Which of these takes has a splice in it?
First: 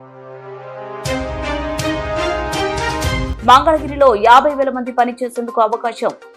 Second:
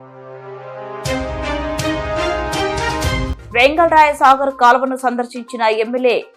first; 1 cut; at 3.3 s

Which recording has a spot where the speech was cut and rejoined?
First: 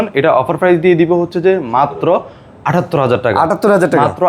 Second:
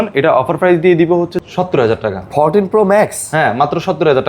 second; 1 cut; at 1.3 s

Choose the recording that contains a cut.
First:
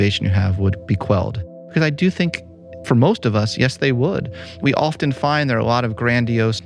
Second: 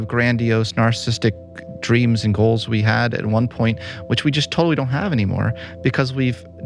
first; 3 cuts; at 1.6 s, 2.7 s, 4.6 s

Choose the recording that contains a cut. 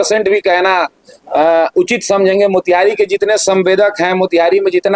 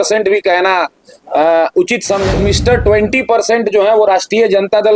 second; 1 cut; at 2.3 s

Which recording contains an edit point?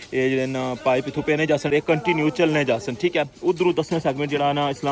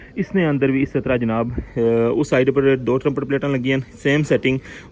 first; 1 cut; at 1.7 s

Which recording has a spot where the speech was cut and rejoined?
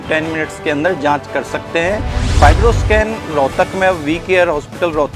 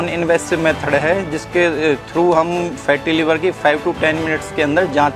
first; 1 cut; at 2.2 s

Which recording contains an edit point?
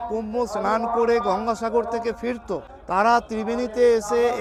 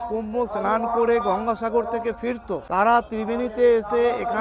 second; 1 cut; at 2.6 s

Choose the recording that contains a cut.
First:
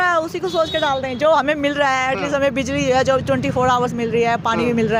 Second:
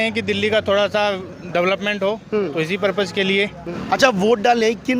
second; 1 cut; at 3.7 s

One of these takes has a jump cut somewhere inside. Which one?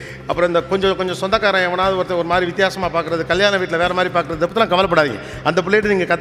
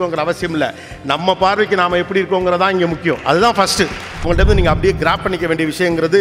second; 1 cut; at 4.3 s

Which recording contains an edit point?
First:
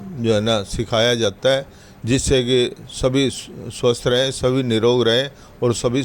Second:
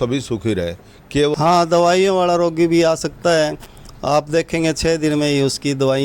second; 1 cut; at 1.3 s

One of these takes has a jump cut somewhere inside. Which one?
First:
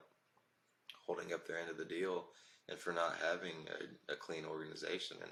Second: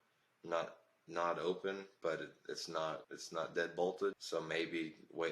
second; 2 cuts; at 3.1 s, 4.2 s

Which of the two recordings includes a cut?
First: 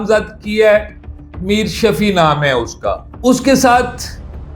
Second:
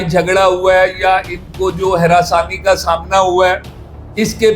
first; 1 cut; at 3.1 s

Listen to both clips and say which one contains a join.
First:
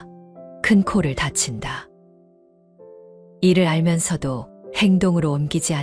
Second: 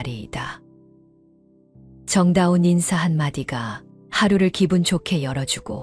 first; 2 cuts; at 1.9 s, 3.4 s

